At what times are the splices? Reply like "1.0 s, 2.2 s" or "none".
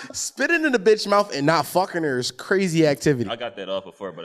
3.3 s